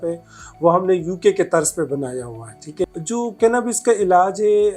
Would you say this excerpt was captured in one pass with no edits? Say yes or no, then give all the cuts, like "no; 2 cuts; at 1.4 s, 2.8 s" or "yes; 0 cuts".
no; 1 cut; at 2.8 s